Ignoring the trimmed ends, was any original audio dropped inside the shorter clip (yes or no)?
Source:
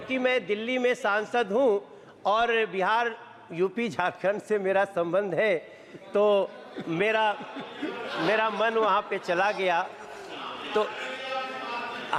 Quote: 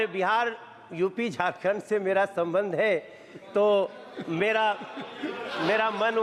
no